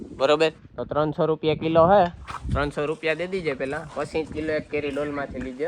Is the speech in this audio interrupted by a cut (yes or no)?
no